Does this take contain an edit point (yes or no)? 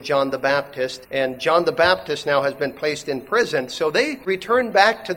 yes